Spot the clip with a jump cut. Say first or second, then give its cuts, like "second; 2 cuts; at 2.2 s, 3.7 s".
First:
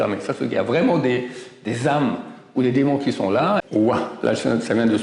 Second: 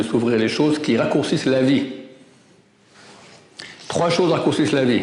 first; 1 cut; at 3.6 s